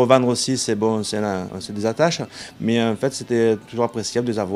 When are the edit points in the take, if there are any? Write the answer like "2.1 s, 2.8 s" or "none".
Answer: 2.3 s